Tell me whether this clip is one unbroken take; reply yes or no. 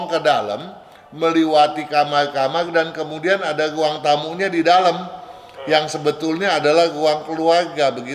yes